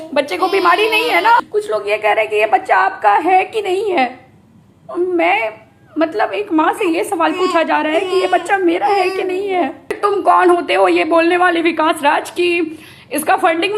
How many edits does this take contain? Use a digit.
2